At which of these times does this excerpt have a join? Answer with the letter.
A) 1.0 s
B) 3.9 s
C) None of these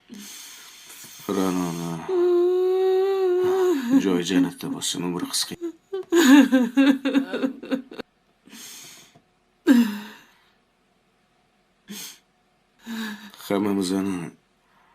A